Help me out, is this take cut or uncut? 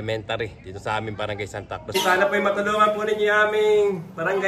cut